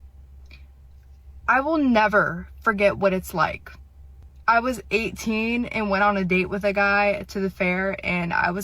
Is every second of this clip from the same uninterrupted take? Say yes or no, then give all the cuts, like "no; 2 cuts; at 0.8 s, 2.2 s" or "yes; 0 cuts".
no; 1 cut; at 5.7 s